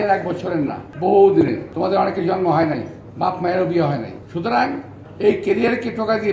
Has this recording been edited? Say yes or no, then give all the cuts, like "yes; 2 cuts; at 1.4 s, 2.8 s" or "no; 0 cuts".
yes; 3 cuts; at 0.9 s, 1.7 s, 4.2 s